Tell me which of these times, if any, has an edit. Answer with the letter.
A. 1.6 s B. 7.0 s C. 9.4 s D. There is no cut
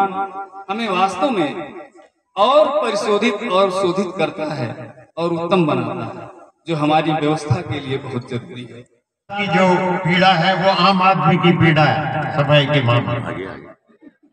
C